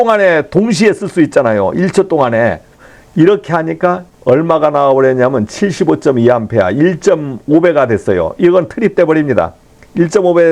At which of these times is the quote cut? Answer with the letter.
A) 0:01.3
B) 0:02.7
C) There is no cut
B